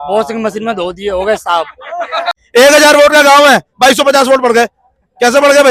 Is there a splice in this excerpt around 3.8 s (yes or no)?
no